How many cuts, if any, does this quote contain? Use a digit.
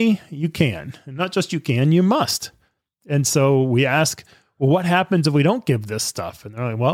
0